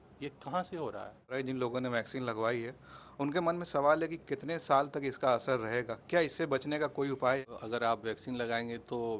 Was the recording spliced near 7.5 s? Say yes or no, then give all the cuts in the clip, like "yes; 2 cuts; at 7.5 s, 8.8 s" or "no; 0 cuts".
yes; 2 cuts; at 1.3 s, 7.5 s